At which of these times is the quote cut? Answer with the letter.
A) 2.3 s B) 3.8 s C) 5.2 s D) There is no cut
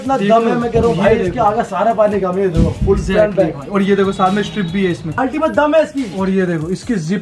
C